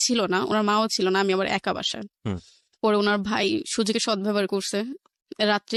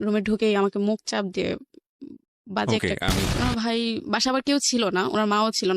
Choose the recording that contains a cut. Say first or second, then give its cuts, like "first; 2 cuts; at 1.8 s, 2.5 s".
second; 1 cut; at 3.3 s